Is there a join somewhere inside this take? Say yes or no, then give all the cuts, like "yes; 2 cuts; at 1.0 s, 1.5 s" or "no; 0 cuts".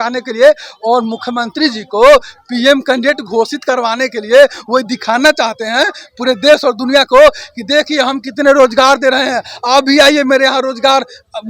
no; 0 cuts